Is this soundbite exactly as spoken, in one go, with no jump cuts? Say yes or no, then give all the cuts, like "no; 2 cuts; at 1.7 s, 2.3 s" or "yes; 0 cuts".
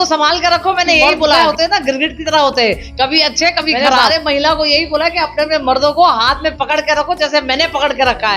no; 2 cuts; at 1.4 s, 4.0 s